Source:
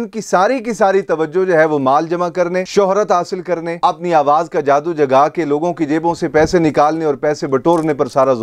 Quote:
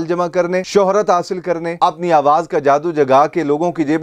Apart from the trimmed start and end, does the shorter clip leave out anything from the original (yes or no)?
no